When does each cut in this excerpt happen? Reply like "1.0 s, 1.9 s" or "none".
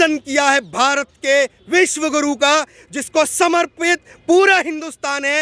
none

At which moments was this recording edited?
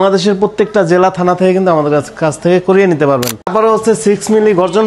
3.3 s

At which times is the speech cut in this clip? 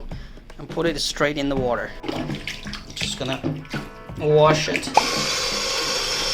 2.1 s, 5.0 s

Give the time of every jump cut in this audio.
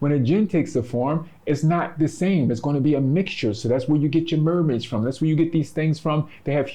none

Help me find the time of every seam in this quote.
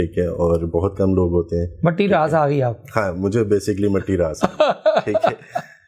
none

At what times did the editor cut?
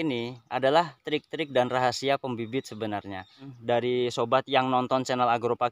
3.5 s

